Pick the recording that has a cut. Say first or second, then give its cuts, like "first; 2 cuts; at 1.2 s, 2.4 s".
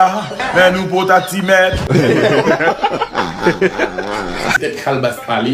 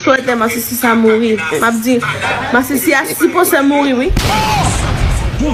first; 2 cuts; at 1.8 s, 4.6 s